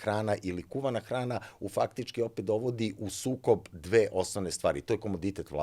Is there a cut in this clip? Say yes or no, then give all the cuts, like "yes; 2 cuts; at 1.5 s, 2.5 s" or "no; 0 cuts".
no; 0 cuts